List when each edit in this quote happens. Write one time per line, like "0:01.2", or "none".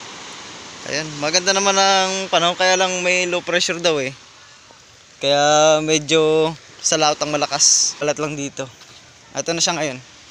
0:08.0